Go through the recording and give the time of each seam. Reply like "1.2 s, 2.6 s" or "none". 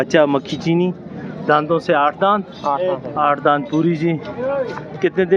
none